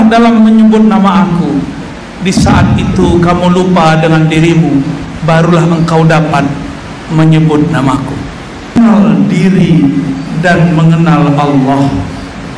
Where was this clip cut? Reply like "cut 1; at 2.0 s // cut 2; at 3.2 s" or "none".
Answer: cut 1; at 8.8 s